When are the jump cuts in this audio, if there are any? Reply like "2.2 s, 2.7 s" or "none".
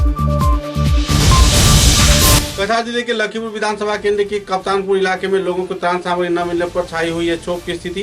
2.5 s